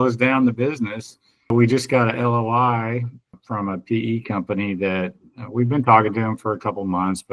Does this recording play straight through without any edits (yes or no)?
no